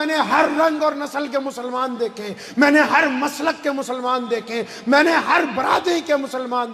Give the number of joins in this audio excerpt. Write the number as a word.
zero